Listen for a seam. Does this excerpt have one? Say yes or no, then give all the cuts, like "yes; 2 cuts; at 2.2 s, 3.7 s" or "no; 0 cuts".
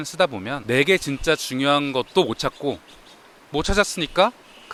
no; 0 cuts